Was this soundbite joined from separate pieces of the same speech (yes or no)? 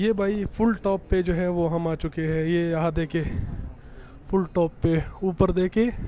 no